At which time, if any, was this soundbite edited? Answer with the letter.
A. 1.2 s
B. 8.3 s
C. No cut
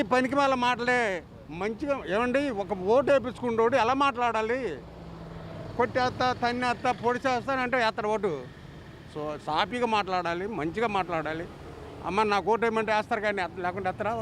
A